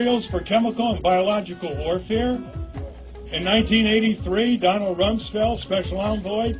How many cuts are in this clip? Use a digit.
1